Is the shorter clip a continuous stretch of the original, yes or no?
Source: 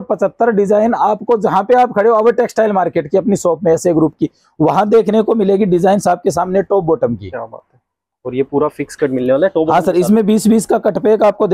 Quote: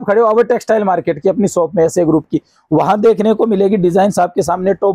yes